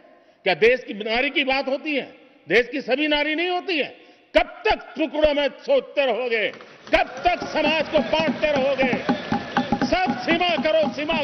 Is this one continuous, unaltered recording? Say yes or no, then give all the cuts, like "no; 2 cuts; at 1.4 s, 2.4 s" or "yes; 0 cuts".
yes; 0 cuts